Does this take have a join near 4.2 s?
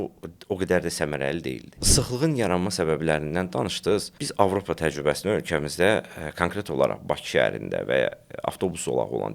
yes; 2 cuts; at 1.9 s, 4.2 s

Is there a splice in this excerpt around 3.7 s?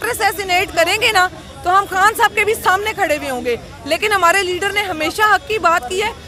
no; 0 cuts

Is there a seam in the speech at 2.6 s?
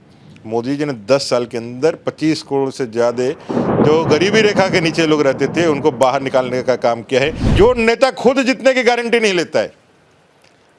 no; 1 cut; at 7.4 s

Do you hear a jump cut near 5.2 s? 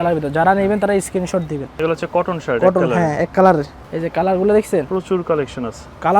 no; 2 cuts; at 1.7 s, 3.8 s

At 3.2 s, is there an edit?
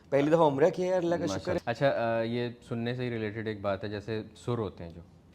no; 1 cut; at 1.6 s

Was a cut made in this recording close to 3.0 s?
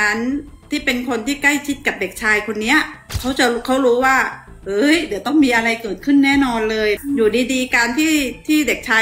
yes; 2 cuts; at 3.0 s, 7.0 s

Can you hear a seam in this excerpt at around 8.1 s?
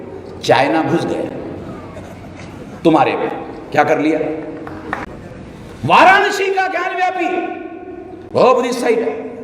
no; 1 cut; at 5.1 s

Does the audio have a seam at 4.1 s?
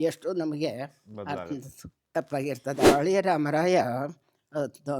no; 1 cut; at 2.8 s

